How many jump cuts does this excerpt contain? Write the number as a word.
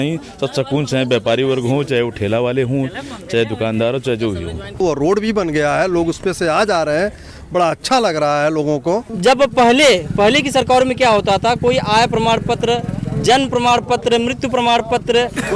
two